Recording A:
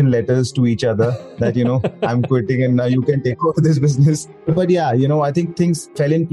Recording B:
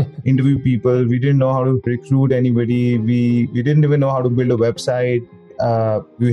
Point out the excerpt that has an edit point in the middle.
B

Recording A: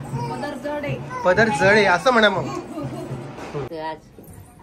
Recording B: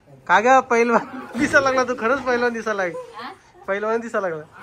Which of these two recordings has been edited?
A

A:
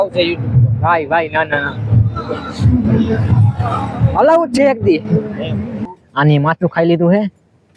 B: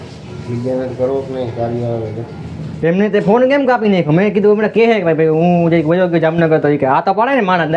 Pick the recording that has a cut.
A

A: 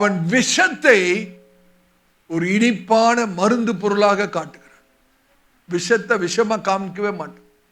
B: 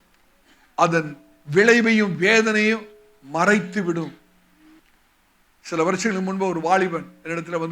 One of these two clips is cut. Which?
B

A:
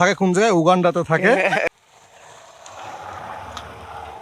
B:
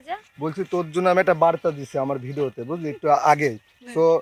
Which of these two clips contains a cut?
A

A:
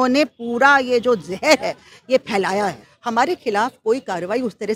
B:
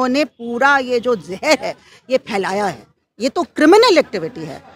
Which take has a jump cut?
A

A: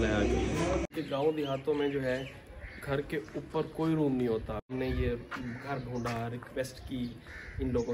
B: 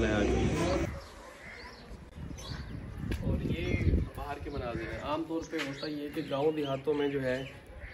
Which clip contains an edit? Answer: A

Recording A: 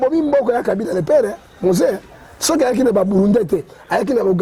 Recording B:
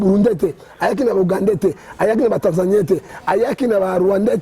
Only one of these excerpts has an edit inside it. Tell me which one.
B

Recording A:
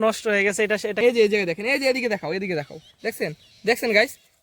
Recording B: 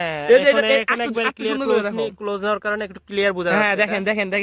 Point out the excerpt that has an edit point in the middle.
A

